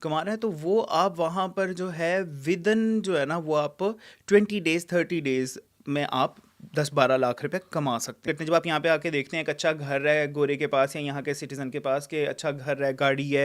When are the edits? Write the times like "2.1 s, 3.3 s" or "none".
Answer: 8.2 s